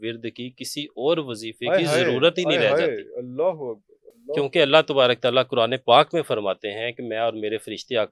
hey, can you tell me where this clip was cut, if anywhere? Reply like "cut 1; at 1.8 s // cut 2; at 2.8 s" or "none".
none